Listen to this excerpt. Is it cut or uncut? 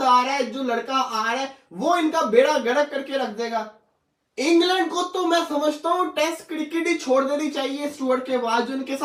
uncut